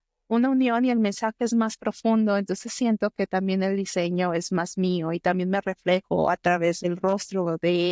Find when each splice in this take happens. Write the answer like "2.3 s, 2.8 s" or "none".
6.8 s